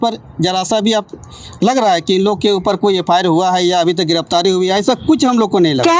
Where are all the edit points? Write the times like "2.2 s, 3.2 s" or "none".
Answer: none